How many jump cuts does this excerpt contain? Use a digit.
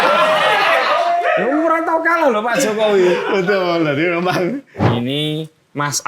1